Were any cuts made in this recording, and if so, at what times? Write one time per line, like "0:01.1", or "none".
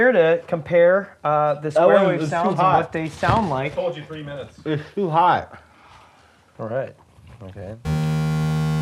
none